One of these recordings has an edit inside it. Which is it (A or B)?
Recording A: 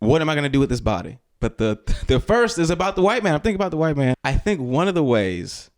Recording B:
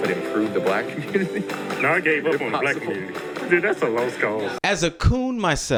A